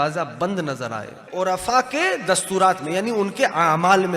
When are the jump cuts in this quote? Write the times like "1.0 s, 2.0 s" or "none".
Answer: 1.2 s